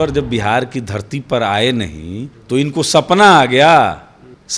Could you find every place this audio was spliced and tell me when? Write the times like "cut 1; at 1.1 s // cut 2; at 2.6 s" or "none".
none